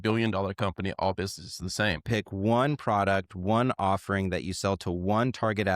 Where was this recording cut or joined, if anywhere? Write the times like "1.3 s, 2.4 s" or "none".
2.0 s